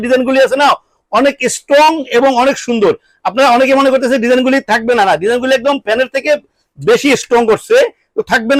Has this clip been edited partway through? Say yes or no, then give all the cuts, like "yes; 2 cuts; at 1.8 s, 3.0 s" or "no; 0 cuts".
no; 0 cuts